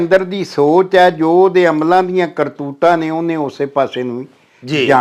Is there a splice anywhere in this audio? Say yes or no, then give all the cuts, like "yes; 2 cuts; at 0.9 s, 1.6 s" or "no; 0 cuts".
no; 0 cuts